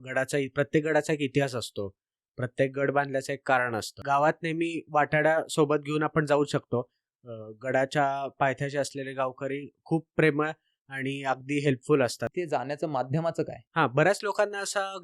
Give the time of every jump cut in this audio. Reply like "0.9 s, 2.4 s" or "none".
3.9 s, 12.3 s

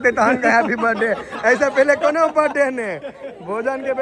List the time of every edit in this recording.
none

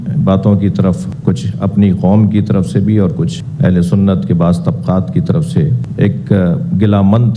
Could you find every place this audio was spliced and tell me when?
none

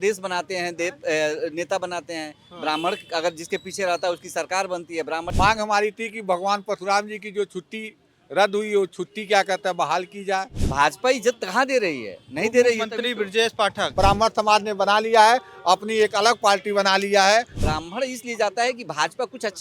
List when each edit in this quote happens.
5.3 s, 10.6 s, 13.9 s, 17.6 s

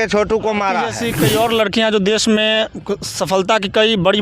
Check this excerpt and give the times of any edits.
1.0 s

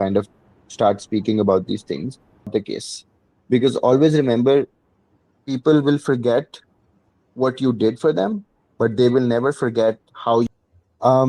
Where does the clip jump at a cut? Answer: 2.5 s, 10.5 s

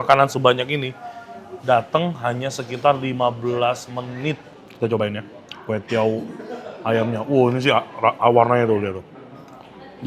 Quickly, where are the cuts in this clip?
4.5 s

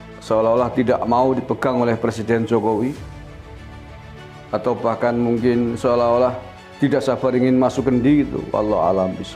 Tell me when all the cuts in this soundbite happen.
3.0 s, 4.5 s

